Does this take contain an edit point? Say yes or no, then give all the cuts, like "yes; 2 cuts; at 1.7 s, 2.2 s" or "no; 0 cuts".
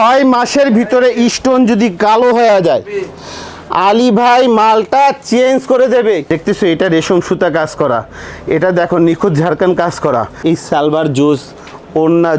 yes; 2 cuts; at 6.2 s, 10.3 s